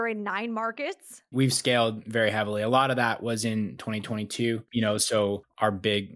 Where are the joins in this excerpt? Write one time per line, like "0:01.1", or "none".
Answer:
0:01.2